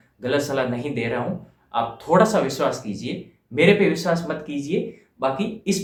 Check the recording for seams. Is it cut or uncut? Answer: uncut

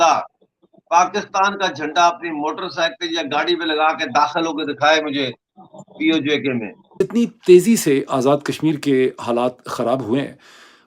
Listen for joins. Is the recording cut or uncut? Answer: cut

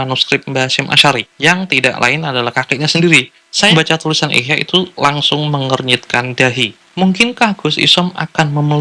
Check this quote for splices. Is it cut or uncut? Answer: cut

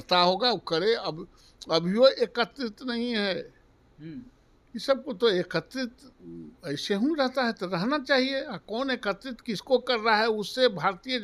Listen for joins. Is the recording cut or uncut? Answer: uncut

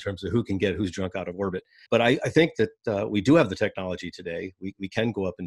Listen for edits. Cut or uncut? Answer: cut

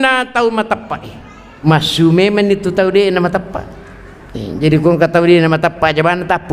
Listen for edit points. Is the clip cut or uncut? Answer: cut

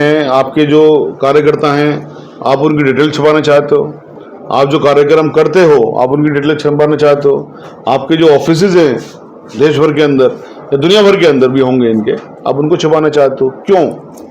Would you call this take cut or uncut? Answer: uncut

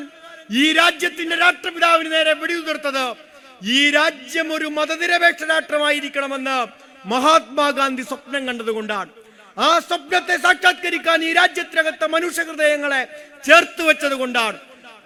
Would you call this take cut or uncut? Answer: uncut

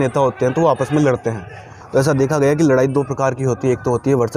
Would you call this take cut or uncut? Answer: uncut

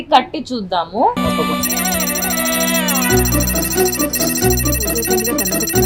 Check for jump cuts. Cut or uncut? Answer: uncut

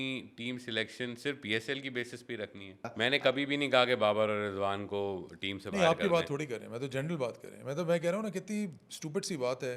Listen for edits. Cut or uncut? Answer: cut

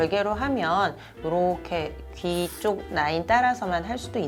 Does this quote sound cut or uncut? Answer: uncut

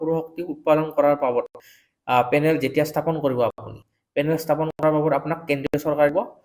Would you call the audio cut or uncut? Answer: uncut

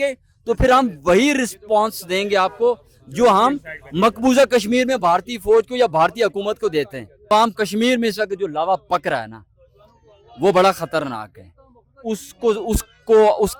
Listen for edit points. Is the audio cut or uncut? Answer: cut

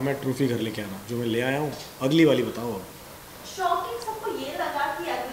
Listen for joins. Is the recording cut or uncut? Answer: uncut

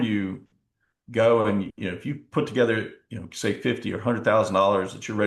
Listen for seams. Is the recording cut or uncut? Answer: uncut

